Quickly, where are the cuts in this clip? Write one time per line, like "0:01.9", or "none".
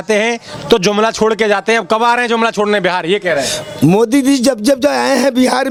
none